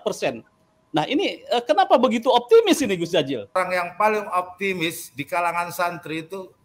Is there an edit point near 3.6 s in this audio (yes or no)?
yes